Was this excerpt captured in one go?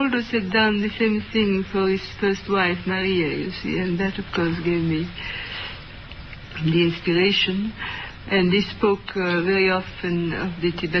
yes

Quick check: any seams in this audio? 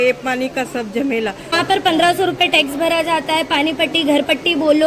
yes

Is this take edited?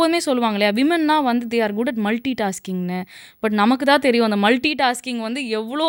no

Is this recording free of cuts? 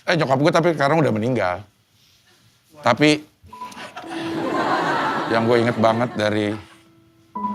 yes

